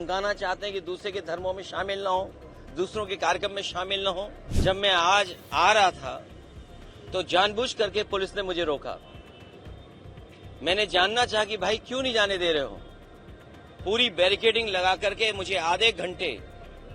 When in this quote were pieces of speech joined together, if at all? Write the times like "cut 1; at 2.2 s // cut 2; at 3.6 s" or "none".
cut 1; at 4.4 s